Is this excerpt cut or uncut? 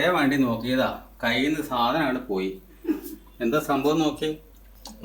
uncut